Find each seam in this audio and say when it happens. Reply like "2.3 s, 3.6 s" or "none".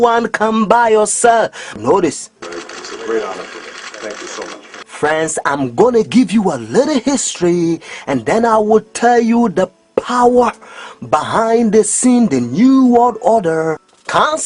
none